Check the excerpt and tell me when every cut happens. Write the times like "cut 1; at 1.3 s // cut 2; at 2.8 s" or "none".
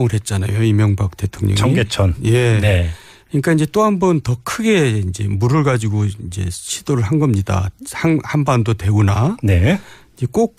cut 1; at 2.0 s